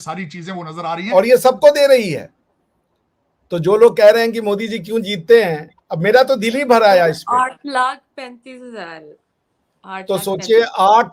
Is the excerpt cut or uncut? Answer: cut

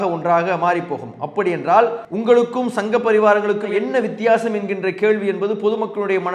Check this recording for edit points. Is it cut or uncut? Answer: cut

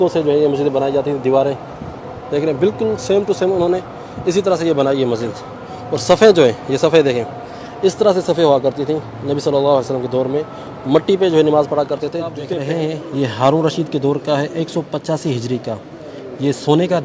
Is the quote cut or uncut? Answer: cut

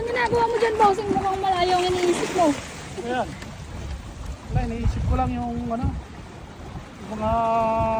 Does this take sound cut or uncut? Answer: uncut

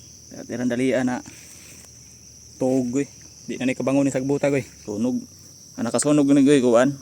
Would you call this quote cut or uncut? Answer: cut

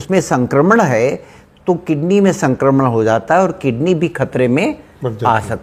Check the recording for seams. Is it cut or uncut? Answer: uncut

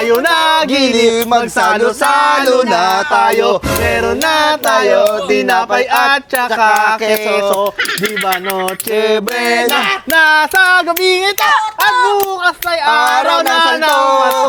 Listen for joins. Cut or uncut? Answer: uncut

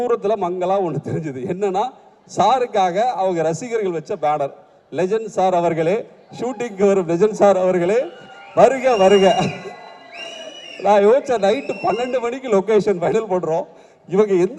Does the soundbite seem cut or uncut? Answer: uncut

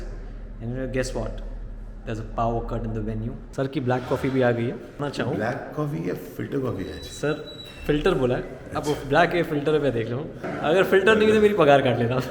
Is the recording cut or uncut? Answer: cut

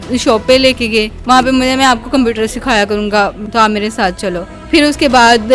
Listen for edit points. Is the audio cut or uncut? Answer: cut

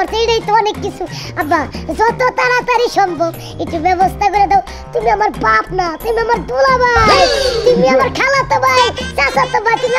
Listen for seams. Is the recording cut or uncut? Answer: uncut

